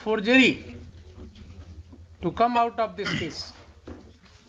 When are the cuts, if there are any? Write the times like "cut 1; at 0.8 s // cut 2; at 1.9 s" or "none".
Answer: none